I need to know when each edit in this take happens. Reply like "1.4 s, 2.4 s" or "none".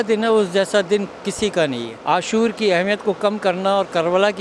1.9 s